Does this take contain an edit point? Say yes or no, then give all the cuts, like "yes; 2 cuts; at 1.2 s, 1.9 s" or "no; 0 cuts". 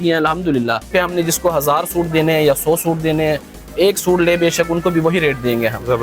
yes; 1 cut; at 0.9 s